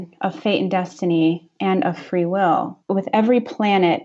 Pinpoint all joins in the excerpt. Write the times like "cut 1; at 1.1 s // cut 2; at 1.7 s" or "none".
cut 1; at 2.9 s

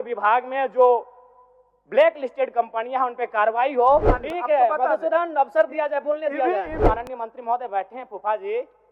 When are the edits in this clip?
cut 1; at 4.1 s // cut 2; at 6.8 s

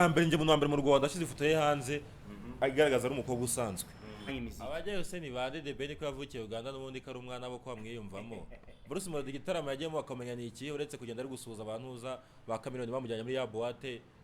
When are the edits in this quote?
cut 1; at 4.3 s

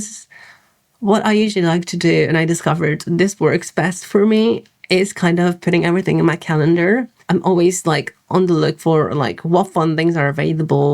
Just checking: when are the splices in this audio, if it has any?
cut 1; at 7.1 s

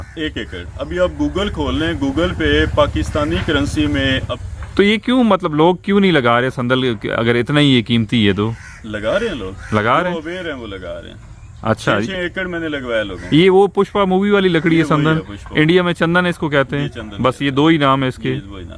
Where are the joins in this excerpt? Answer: cut 1; at 4.3 s

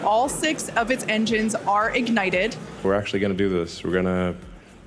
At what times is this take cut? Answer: cut 1; at 2.9 s

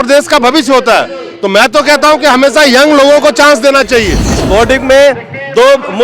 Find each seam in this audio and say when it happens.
cut 1; at 4.4 s

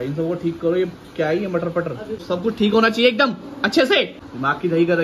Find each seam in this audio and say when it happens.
cut 1; at 2.2 s // cut 2; at 4.1 s

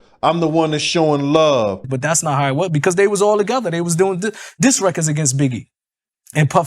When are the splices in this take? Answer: cut 1; at 1.9 s

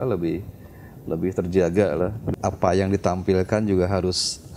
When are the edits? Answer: cut 1; at 2.3 s

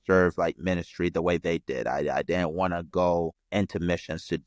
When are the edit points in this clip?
cut 1; at 3.4 s

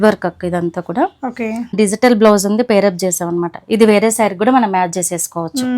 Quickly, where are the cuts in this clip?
cut 1; at 1.8 s

